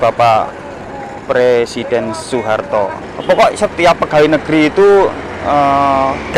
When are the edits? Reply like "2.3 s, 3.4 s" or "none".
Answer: 3.0 s